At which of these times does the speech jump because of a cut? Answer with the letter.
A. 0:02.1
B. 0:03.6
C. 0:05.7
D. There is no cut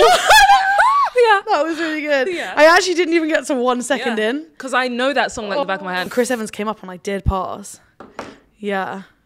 C